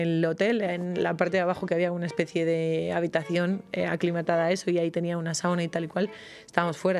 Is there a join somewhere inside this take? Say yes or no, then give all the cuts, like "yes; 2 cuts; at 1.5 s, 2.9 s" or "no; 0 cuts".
no; 0 cuts